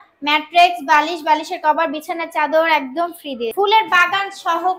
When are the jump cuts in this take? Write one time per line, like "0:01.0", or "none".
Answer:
0:03.5